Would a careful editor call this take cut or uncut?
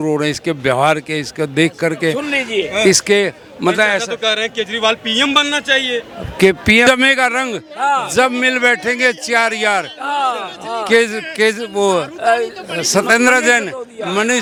uncut